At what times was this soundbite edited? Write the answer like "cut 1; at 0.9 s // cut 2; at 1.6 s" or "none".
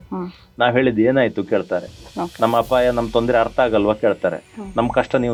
none